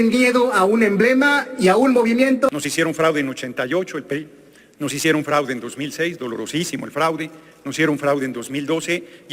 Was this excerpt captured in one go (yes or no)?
no